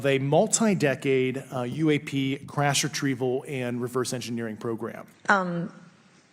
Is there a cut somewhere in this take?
yes; 1 cut; at 5.1 s

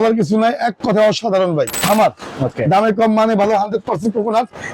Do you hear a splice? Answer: yes; 1 cut; at 1.8 s

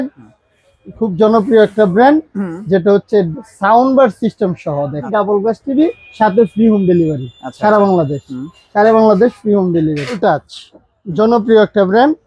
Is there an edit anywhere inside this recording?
yes; 2 cuts; at 5.0 s, 10.2 s

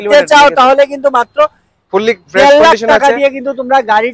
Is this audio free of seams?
yes; 0 cuts

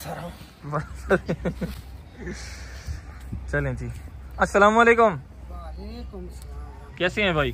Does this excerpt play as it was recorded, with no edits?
yes; 0 cuts

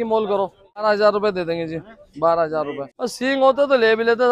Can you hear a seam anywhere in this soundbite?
yes; 2 cuts; at 0.8 s, 2.9 s

